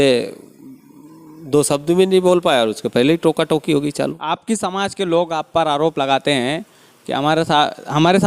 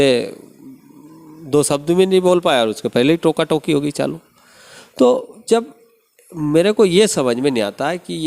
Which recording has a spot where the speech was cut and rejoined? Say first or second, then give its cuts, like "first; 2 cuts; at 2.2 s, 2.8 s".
first; 1 cut; at 4.2 s